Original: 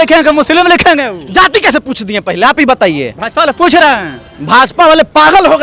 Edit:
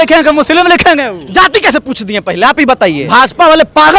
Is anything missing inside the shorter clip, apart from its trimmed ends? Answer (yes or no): yes